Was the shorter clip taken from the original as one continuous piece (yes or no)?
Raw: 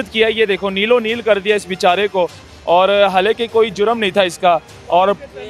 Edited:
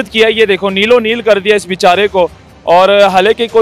yes